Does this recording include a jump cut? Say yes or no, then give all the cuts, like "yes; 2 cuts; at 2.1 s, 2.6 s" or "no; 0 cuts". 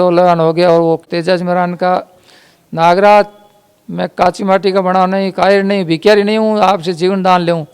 yes; 1 cut; at 1.0 s